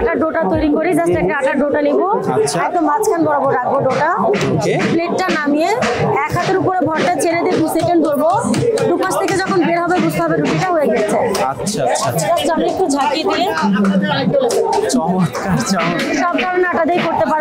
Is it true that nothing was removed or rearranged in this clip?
yes; 0 cuts

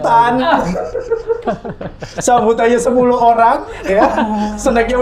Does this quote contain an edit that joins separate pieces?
no; 0 cuts

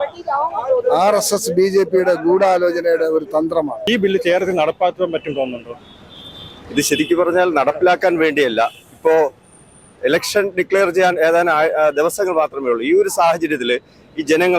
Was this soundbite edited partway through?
no; 0 cuts

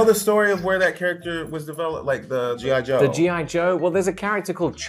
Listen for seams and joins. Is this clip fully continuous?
yes; 0 cuts

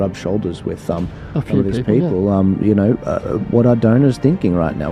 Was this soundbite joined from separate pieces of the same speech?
no; 0 cuts

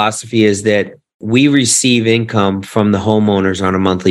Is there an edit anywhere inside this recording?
no; 0 cuts

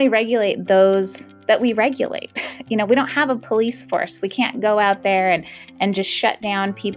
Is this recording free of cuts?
yes; 0 cuts

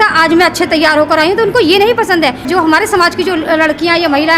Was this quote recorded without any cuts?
no; 1 cut; at 2.5 s

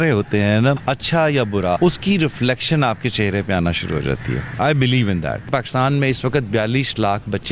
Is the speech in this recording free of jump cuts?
no; 3 cuts; at 0.8 s, 1.8 s, 5.5 s

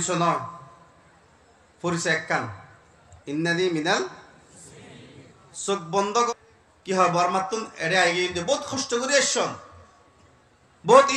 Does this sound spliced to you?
yes; 1 cut; at 6.3 s

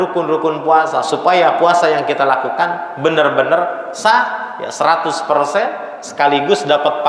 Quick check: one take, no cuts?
yes; 0 cuts

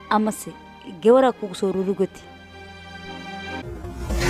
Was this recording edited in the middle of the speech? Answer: no; 0 cuts

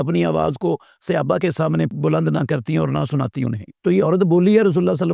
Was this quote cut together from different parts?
yes; 2 cuts; at 1.9 s, 3.7 s

